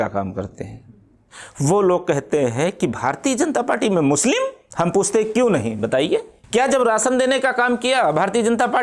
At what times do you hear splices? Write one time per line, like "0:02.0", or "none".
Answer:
0:04.6
0:06.4

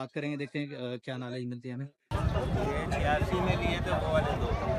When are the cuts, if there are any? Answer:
0:02.1

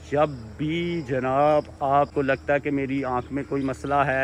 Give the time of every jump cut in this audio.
0:02.1

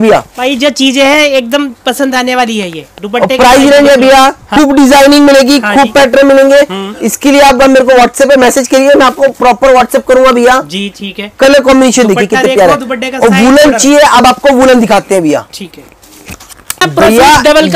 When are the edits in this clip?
0:04.4
0:16.8

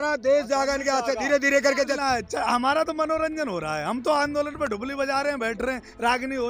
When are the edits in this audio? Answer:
0:01.9

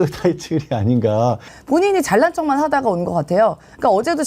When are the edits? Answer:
0:01.5

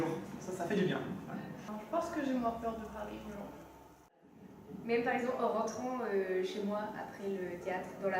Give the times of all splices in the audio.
0:01.7
0:04.2

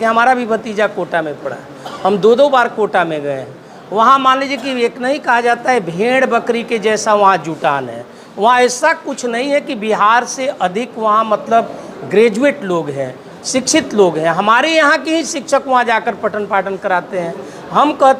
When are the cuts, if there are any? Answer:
none

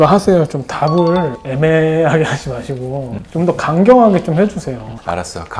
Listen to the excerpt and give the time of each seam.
none

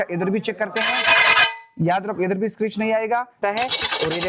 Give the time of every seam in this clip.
0:03.4

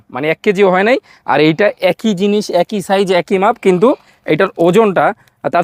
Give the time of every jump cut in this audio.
none

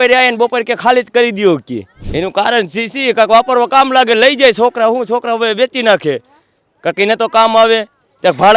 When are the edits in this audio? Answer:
0:01.9

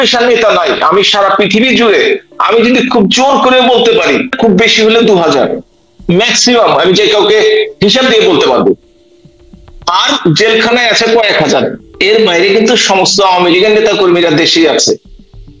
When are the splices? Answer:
0:04.3

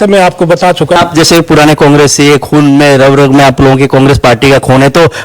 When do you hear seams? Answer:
0:01.0

